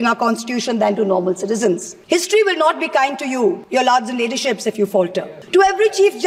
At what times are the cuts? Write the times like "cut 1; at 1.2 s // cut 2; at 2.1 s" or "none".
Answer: cut 1; at 1.9 s // cut 2; at 3.6 s // cut 3; at 5.3 s